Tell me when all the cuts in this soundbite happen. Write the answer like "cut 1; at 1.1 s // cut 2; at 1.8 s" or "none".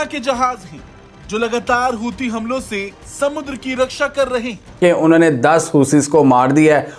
cut 1; at 4.7 s